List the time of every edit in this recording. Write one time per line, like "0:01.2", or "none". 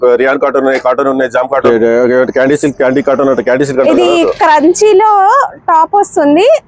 0:01.6